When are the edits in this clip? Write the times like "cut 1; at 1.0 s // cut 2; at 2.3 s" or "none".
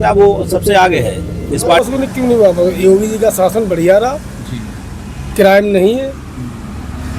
cut 1; at 1.8 s